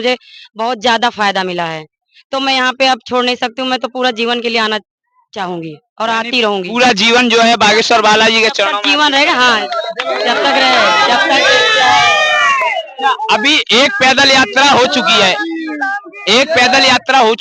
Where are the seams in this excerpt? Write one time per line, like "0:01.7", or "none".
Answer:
none